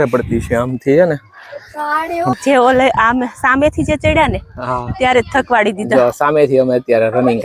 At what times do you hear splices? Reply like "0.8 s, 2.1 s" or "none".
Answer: 2.3 s

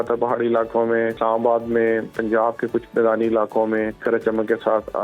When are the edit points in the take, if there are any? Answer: 1.2 s, 4.0 s

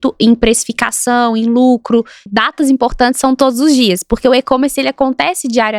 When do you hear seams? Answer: 2.3 s

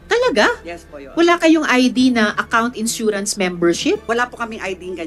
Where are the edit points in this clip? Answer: 4.0 s

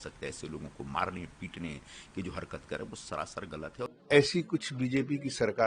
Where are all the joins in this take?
3.9 s

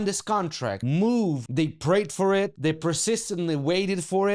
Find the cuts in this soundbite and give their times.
0.8 s, 1.4 s, 2.5 s

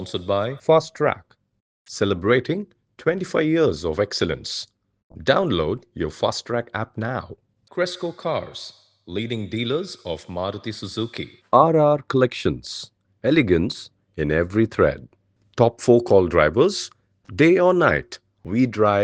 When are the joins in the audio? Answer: none

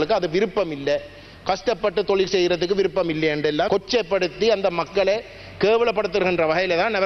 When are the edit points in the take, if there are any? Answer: 3.7 s

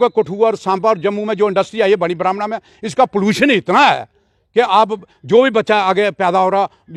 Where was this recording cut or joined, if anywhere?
none

